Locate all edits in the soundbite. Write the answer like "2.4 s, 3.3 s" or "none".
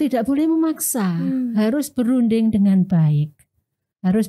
none